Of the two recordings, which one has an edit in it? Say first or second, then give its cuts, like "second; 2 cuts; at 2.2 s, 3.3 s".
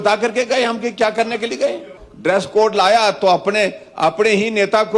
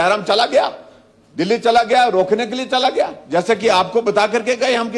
first; 1 cut; at 2.0 s